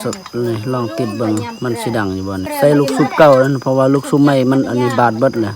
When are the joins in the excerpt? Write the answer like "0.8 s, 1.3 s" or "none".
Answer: 2.5 s